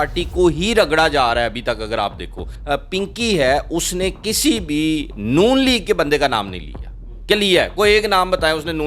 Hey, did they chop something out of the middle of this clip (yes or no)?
yes